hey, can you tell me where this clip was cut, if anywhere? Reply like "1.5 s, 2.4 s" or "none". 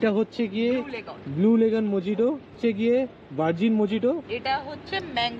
none